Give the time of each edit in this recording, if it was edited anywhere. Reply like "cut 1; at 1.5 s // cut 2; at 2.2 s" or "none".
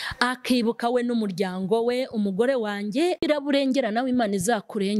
cut 1; at 3.3 s